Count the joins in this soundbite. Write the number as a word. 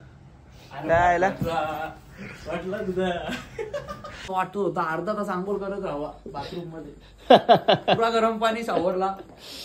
one